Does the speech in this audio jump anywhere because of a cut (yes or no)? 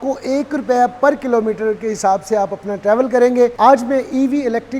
no